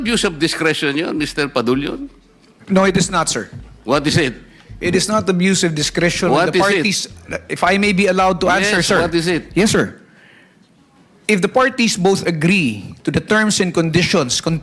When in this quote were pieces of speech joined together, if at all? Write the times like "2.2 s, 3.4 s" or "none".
none